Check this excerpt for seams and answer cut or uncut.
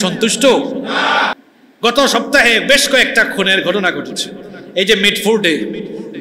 cut